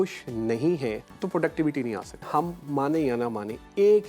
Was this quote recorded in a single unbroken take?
no; 2 cuts; at 1.1 s, 2.3 s

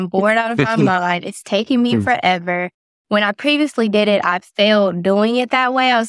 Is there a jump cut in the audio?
no; 0 cuts

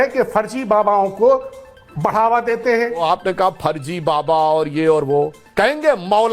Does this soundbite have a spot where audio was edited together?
yes; 2 cuts; at 3.0 s, 5.4 s

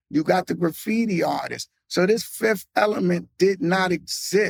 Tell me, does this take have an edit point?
no; 0 cuts

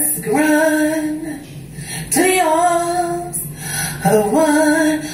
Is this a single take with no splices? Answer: yes; 0 cuts

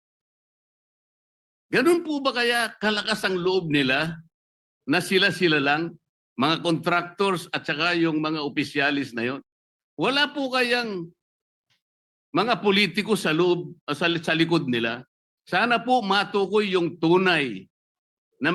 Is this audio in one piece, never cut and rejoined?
yes; 0 cuts

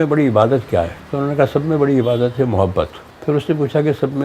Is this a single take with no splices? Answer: no; 2 cuts; at 1.0 s, 3.0 s

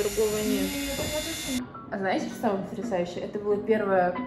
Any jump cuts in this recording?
yes; 1 cut; at 1.7 s

